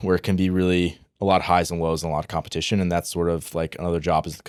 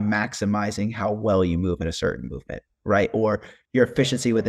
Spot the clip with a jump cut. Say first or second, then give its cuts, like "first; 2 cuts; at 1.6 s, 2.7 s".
second; 1 cut; at 3.5 s